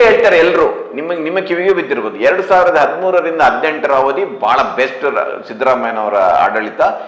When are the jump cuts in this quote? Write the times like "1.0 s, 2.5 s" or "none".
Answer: none